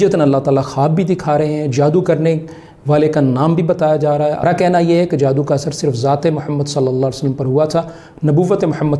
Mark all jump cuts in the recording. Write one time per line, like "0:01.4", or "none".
0:04.4